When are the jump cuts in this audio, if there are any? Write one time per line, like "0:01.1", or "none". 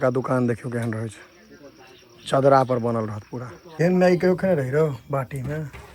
0:03.7